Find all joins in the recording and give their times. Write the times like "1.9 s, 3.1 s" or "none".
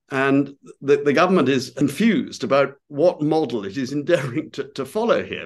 1.8 s